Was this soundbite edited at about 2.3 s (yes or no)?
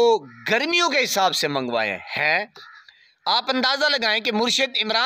no